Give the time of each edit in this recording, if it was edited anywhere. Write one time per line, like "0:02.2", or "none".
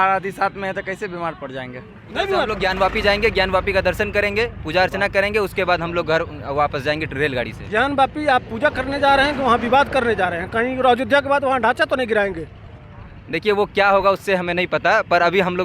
0:02.5

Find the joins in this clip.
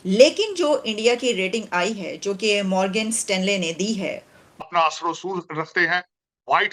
0:04.6

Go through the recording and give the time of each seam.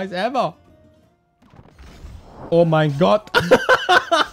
0:02.4

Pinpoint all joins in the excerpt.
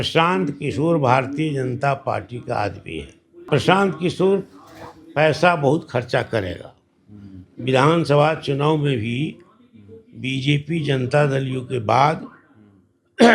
0:03.4

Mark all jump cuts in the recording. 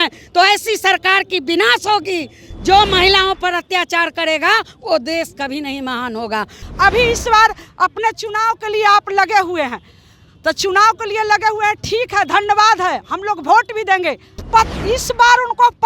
0:06.6
0:14.4

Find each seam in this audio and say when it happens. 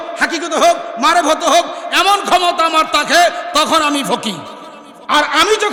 none

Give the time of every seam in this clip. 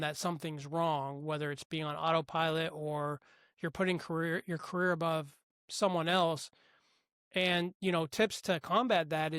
none

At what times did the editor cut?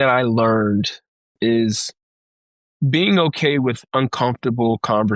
0:01.4

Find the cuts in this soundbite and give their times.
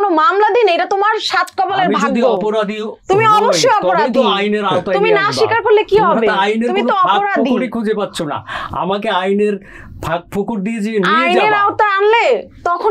none

